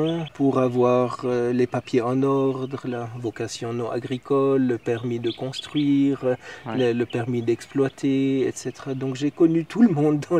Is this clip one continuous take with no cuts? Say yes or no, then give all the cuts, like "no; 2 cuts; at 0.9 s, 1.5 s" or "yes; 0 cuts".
yes; 0 cuts